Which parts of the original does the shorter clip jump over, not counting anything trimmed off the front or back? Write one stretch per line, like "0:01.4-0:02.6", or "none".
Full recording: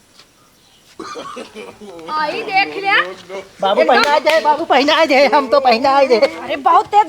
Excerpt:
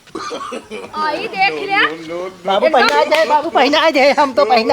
0:01.8-0:02.1